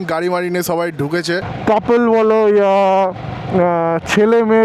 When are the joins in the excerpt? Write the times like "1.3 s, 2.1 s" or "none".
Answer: 1.5 s